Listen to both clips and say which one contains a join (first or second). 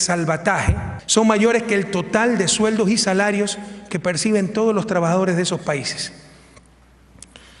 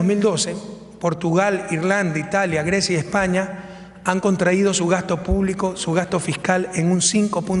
first